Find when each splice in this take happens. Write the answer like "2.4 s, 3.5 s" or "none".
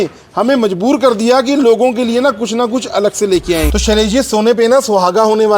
3.7 s